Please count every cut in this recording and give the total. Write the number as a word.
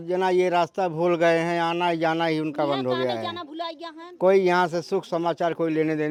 zero